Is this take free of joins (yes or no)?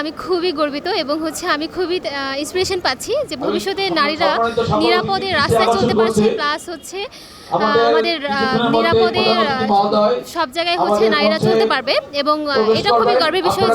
yes